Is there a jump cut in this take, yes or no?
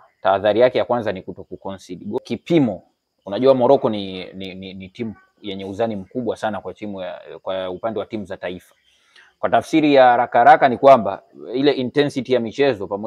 yes